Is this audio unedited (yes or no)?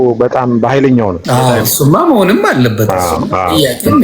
no